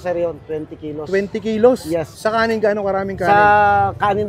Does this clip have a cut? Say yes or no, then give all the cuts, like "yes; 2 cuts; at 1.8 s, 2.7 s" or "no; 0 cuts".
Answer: yes; 1 cut; at 2.1 s